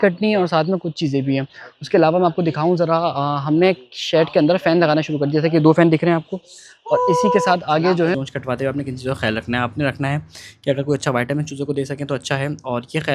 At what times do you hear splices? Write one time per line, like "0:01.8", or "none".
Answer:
0:08.1